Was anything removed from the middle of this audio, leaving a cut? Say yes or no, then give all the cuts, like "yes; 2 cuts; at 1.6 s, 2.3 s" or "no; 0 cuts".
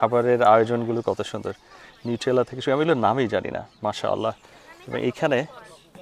no; 0 cuts